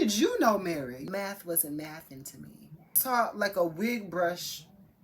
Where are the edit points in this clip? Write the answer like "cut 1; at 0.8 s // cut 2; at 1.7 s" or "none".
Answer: cut 1; at 1.0 s // cut 2; at 3.0 s